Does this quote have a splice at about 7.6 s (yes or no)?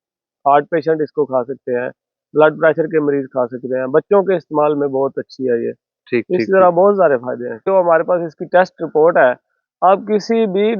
yes